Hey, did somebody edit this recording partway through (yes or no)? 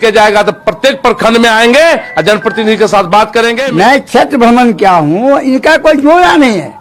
yes